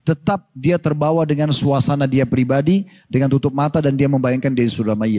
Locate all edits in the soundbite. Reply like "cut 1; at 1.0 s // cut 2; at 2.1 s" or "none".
none